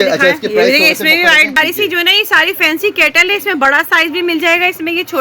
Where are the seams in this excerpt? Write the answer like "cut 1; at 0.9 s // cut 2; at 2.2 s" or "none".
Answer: cut 1; at 1.6 s